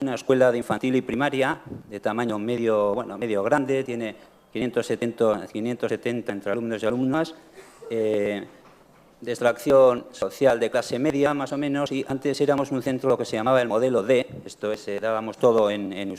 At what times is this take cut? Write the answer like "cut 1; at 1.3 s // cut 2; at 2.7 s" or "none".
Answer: cut 1; at 11.0 s